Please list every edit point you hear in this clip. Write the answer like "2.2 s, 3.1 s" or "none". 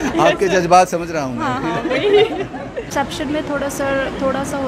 2.9 s